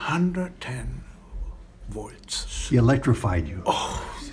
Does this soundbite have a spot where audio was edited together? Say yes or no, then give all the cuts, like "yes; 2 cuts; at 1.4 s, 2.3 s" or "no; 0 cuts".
yes; 1 cut; at 2.5 s